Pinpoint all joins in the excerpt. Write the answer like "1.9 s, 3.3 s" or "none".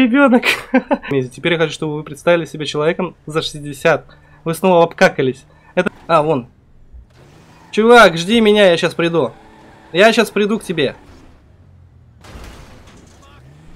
1.1 s, 5.8 s